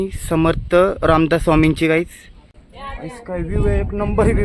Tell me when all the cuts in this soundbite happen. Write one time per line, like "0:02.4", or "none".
0:02.6

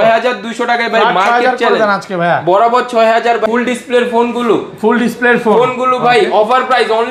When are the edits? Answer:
0:03.5

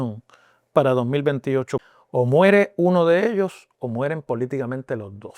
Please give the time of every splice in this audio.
0:01.8

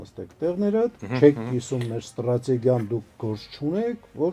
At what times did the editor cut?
0:01.0

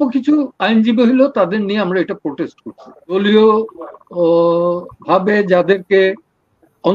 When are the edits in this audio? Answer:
0:03.1

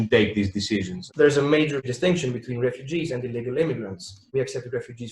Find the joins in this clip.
0:01.0
0:04.3

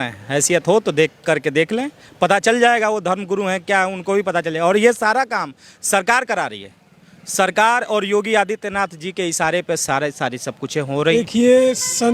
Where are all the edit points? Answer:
0:11.1

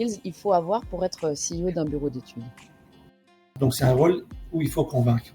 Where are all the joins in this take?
0:03.5

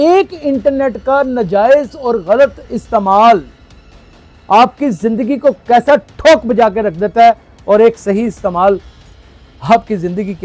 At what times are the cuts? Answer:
none

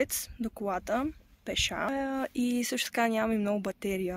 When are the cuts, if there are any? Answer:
0:01.9

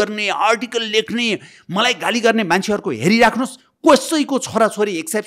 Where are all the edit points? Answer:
none

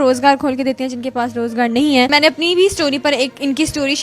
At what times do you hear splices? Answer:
0:02.1

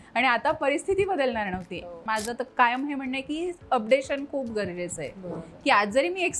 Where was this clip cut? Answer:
0:02.0

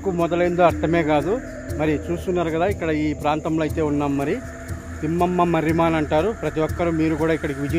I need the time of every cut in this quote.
none

